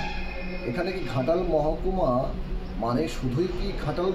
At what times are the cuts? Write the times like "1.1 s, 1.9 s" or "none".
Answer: none